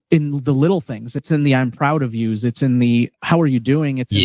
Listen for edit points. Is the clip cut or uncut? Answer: cut